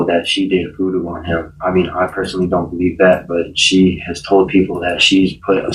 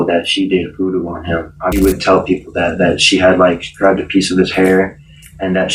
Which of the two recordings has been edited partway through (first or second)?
second